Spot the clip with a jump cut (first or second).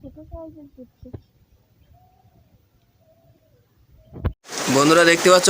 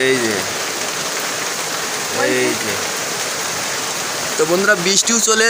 first